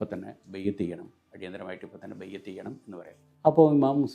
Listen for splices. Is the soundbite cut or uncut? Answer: cut